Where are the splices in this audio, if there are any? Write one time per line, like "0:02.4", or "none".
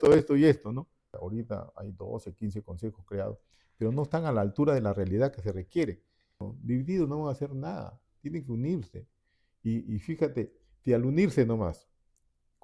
0:01.1
0:06.5

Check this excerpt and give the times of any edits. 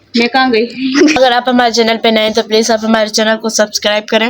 0:01.0

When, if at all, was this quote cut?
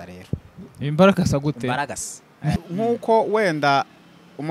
0:02.6

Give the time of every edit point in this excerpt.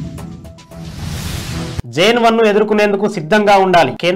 0:01.6

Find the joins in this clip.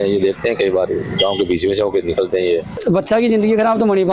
0:02.8

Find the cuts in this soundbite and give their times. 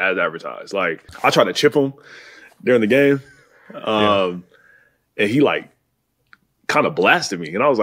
0:01.1

